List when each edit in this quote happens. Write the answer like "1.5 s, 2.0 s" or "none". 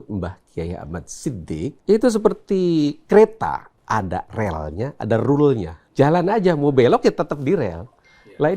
1.8 s, 3.8 s, 5.8 s